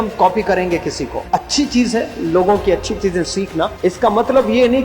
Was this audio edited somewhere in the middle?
yes; 2 cuts; at 1.1 s, 3.7 s

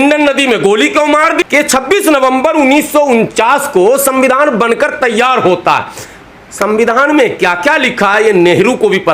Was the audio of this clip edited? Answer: yes; 1 cut; at 1.4 s

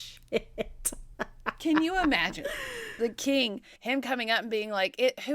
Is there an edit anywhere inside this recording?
yes; 1 cut; at 3.7 s

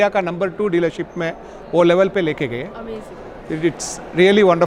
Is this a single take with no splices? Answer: yes; 0 cuts

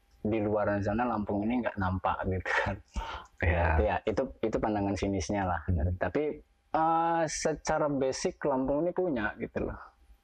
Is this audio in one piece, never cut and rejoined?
no; 1 cut; at 6.5 s

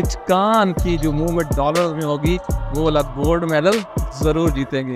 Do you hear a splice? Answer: no; 0 cuts

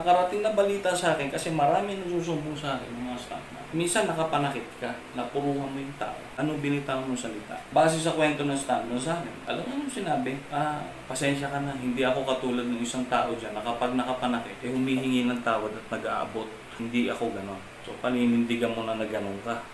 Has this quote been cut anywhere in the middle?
yes; 5 cuts; at 6.3 s, 7.6 s, 9.4 s, 10.4 s, 14.5 s

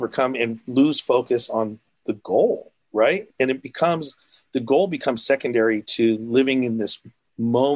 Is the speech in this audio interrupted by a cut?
yes; 1 cut; at 3.3 s

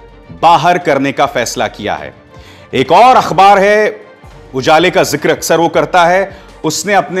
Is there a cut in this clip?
no; 0 cuts

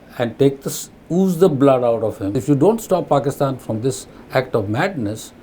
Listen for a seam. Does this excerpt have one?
yes; 1 cut; at 2.4 s

